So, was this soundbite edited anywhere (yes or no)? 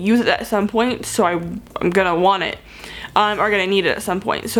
no